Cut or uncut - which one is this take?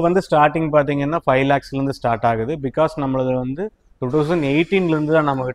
uncut